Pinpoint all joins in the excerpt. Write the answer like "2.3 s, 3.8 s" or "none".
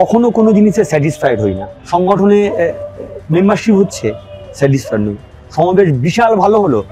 1.7 s